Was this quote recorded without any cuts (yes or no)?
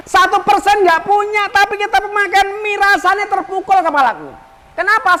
yes